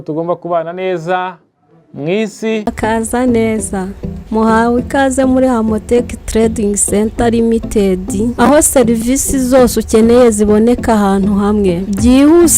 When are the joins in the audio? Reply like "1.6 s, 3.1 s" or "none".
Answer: 2.6 s